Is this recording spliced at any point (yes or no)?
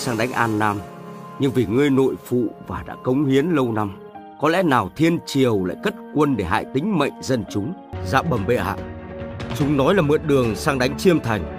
yes